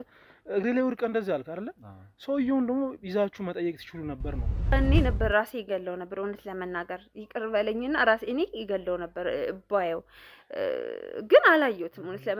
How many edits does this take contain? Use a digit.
1